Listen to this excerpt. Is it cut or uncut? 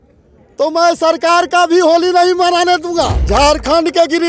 cut